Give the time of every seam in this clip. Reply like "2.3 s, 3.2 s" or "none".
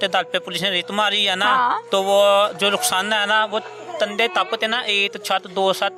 none